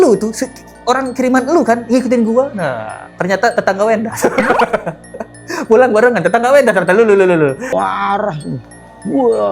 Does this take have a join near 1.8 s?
no; 1 cut; at 7.7 s

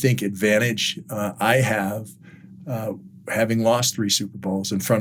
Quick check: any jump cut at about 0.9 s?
no; 0 cuts

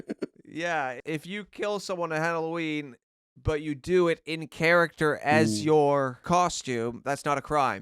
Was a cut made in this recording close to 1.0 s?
yes; 2 cuts; at 1.0 s, 6.2 s

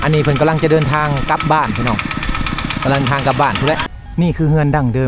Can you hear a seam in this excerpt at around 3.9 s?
yes; 1 cut; at 3.9 s

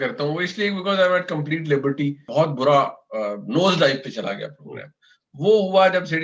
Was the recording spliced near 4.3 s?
no; 1 cut; at 2.3 s

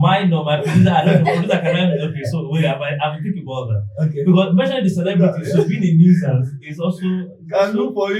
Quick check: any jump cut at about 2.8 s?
no; 0 cuts

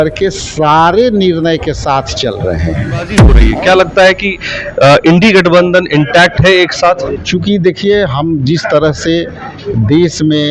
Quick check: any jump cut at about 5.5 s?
no; 2 cuts; at 3.4 s, 7.2 s

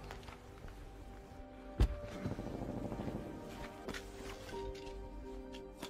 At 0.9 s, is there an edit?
no; 1 cut; at 3.8 s

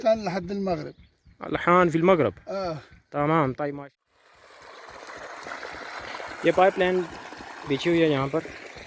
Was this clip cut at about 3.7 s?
yes; 1 cut; at 3.7 s

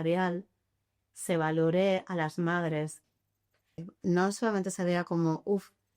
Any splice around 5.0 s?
no; 1 cut; at 3.7 s

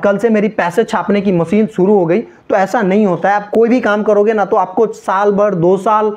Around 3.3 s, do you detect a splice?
no; 0 cuts

